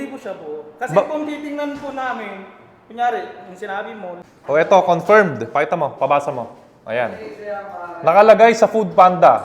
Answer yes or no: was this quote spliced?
yes